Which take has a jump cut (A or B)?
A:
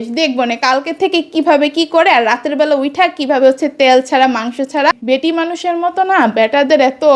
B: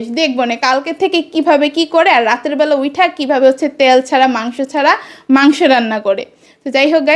A